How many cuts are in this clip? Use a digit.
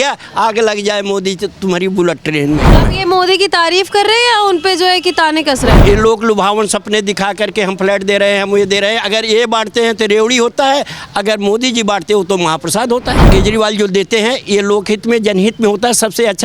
3